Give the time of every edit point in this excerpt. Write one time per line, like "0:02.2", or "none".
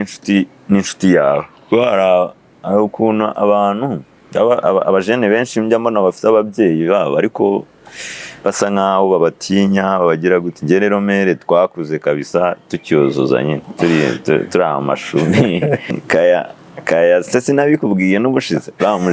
0:15.9